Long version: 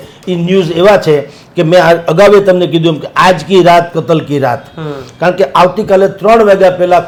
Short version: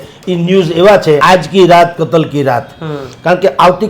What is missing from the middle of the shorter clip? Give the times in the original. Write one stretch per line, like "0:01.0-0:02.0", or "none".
0:01.2-0:03.2